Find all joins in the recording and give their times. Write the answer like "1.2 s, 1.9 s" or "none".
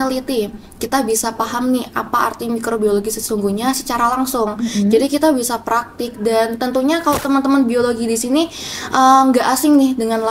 none